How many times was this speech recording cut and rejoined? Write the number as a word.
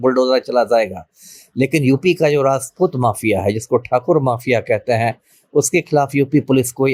zero